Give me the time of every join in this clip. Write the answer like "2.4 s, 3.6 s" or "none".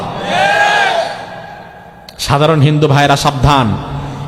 none